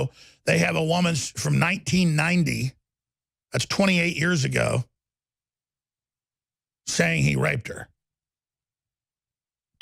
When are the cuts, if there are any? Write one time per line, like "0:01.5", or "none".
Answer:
none